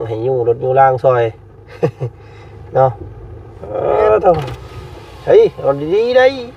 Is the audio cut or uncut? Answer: uncut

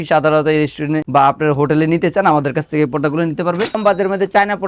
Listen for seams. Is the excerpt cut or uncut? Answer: cut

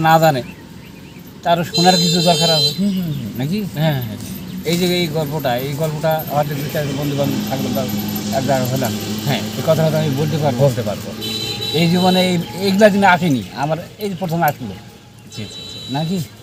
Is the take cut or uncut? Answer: uncut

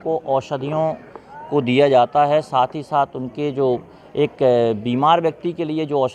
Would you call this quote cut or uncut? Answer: uncut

